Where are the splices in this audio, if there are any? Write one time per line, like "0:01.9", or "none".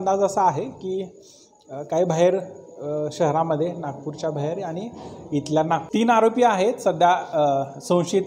0:05.8